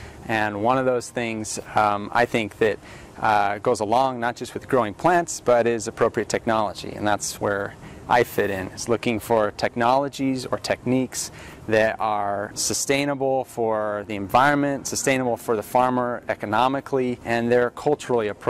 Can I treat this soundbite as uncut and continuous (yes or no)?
no